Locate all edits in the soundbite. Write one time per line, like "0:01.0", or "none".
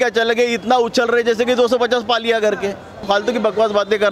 0:03.0